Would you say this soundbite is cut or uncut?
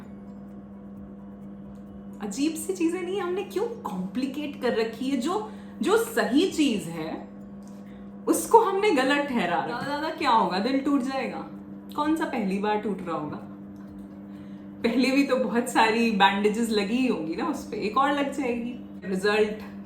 cut